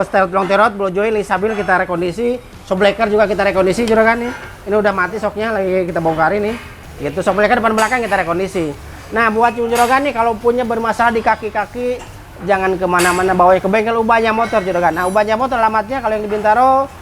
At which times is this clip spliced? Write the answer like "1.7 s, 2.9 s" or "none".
none